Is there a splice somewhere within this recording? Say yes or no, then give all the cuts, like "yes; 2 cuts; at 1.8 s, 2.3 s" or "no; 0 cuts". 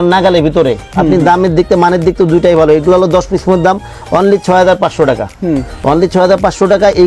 no; 0 cuts